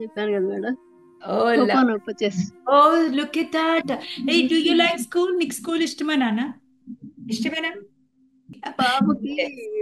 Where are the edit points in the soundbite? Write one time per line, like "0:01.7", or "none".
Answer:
0:08.6